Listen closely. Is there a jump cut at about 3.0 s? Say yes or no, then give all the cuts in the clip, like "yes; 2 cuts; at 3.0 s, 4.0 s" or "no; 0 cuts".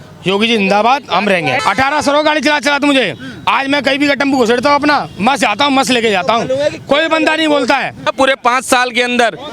no; 2 cuts; at 1.6 s, 8.1 s